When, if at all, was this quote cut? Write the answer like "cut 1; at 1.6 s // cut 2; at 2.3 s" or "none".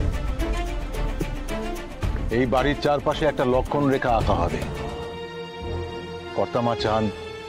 cut 1; at 2.1 s // cut 2; at 6.3 s